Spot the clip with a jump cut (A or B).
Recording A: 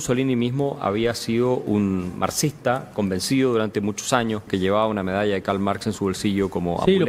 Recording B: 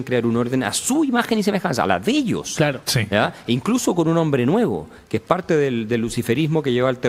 A